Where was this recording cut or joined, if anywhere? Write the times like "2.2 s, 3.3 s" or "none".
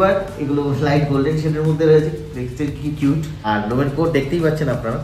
none

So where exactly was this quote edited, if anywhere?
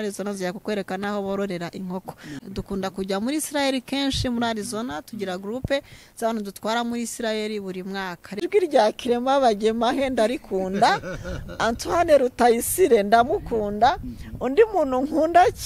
2.5 s, 8.4 s

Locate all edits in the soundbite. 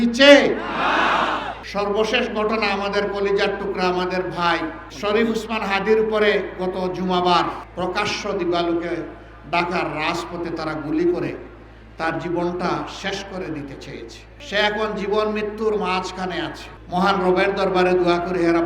1.6 s, 7.6 s

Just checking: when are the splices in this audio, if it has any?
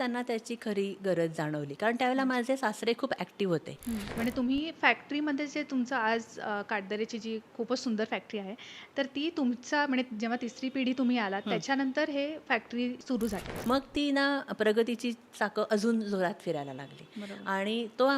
4.1 s, 13.5 s

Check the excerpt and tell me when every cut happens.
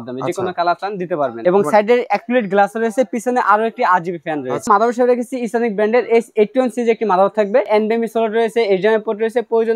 1.4 s, 4.7 s, 7.7 s

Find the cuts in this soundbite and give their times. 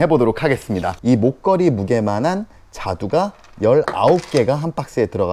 0.9 s

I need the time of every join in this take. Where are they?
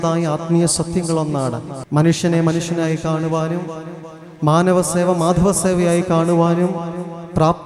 1.7 s

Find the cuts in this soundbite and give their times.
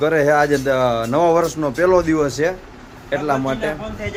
none

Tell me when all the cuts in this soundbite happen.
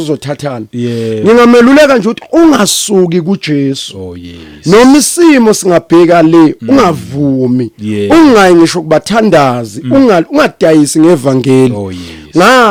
none

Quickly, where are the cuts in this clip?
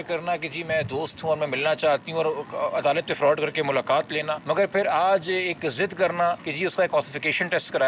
4.4 s, 6.5 s

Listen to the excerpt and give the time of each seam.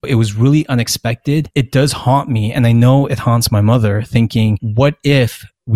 1.5 s

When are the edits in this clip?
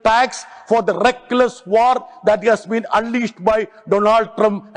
none

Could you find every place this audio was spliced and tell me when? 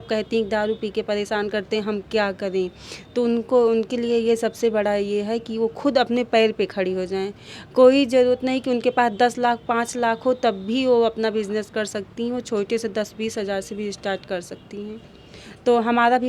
none

